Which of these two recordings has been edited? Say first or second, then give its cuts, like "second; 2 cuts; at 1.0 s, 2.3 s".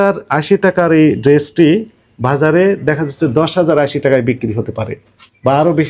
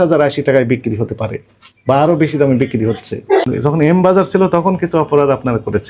second; 1 cut; at 3.4 s